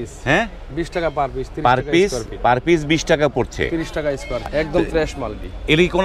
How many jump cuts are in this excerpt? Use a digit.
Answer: 1